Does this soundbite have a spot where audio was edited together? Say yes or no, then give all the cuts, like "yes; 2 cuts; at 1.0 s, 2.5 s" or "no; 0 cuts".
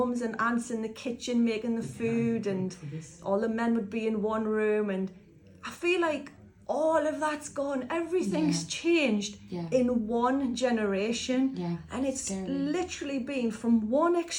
no; 0 cuts